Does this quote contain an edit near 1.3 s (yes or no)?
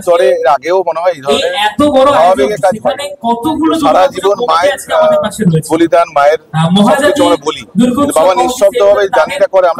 no